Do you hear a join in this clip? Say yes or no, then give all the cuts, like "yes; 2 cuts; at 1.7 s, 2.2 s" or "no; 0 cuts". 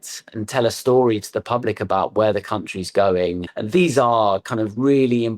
yes; 1 cut; at 3.5 s